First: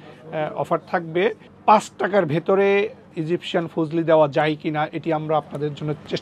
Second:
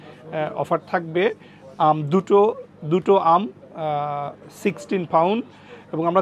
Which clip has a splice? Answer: first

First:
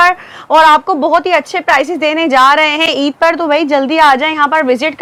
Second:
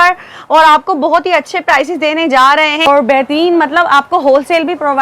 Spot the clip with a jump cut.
second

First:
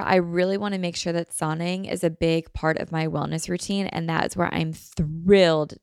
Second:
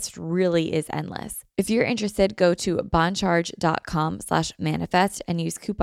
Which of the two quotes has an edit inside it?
second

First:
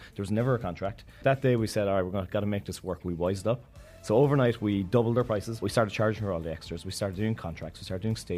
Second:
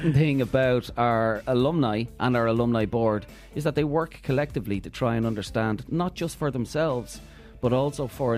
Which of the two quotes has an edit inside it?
first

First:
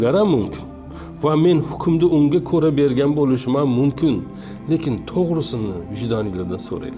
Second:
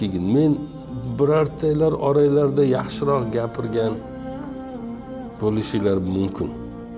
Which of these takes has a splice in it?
second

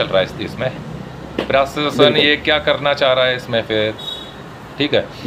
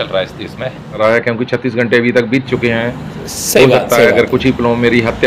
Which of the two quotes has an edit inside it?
second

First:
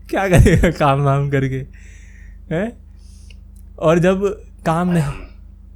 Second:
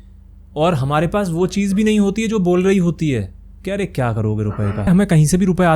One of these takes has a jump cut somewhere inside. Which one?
second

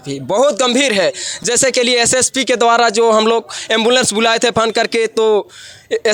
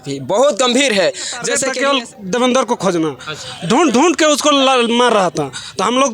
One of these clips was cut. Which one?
second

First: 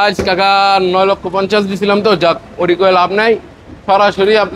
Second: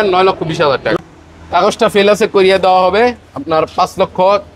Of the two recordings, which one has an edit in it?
second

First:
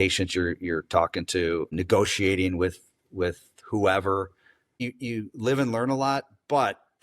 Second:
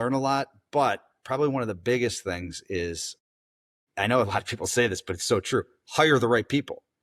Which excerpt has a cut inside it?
first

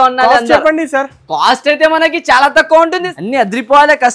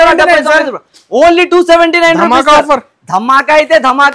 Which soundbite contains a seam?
first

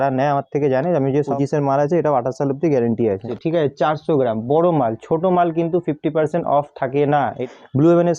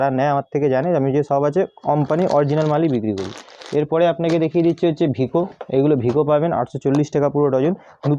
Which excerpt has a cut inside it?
first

